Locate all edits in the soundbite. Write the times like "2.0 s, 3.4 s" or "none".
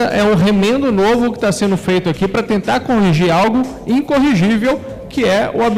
none